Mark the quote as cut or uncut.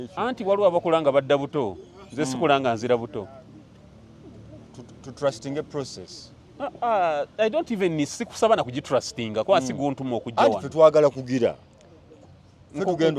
uncut